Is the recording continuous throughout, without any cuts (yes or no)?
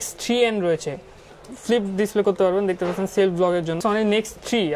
no